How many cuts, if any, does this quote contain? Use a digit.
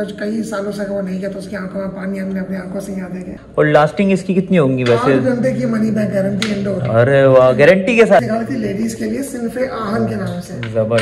2